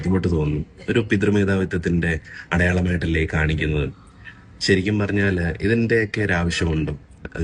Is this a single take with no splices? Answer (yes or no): yes